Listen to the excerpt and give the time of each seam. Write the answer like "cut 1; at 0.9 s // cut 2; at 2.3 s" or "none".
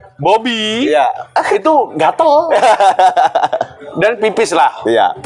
none